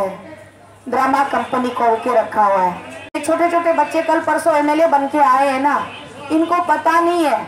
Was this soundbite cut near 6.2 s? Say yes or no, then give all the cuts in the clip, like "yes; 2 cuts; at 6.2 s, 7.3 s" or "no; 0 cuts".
no; 1 cut; at 3.2 s